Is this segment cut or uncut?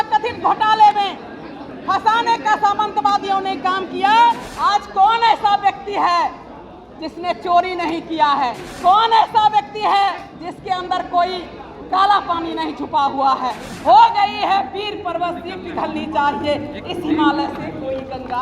cut